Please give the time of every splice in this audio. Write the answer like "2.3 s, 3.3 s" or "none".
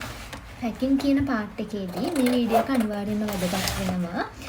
none